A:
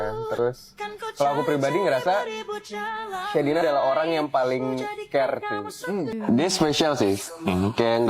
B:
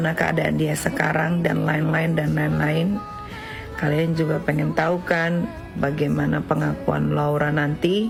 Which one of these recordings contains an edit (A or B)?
A